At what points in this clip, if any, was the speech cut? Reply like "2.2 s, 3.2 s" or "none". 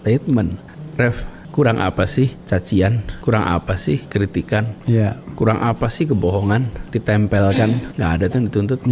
0.9 s, 2.4 s, 3.1 s, 4.1 s, 6.8 s, 7.9 s